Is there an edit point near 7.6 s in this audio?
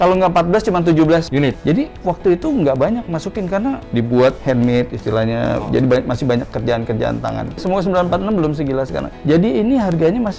yes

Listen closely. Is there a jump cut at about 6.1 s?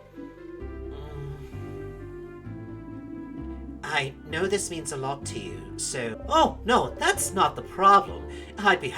yes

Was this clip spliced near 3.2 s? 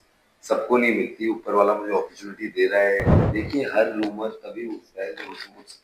yes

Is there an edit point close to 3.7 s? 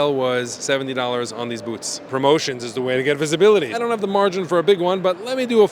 yes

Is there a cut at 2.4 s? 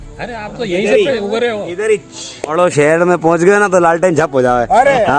yes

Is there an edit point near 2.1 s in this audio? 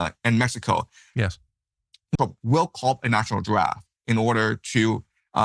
yes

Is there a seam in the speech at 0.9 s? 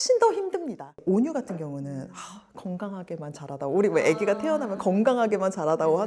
no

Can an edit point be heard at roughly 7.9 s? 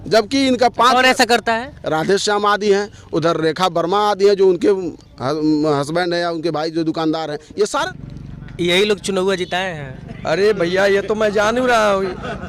yes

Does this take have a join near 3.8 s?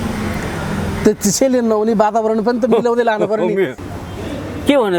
yes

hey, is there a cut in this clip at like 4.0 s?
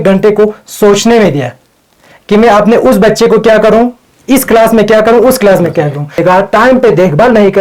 no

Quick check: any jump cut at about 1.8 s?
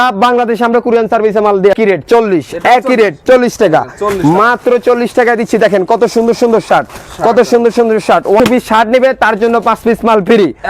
yes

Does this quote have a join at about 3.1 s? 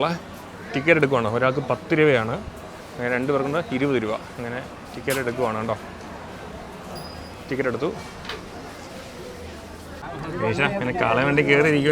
no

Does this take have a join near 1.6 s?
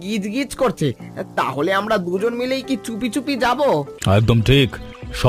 no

